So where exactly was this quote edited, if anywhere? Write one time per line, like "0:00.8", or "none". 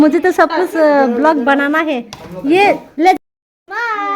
0:03.2